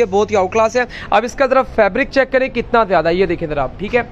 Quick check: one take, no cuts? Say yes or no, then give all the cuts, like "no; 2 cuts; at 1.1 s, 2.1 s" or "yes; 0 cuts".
yes; 0 cuts